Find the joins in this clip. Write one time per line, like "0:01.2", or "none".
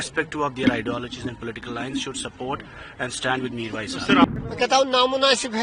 0:04.2